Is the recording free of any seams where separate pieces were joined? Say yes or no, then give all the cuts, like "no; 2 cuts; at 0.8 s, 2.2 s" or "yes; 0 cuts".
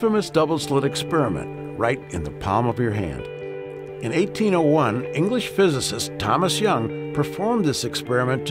no; 1 cut; at 3.4 s